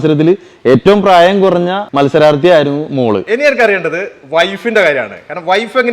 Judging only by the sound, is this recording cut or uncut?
cut